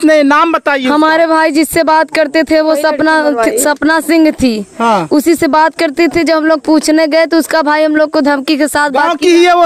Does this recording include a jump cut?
no; 0 cuts

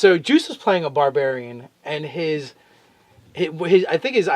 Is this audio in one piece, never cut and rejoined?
no; 1 cut; at 1.7 s

